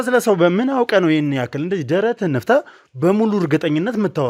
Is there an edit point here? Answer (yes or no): no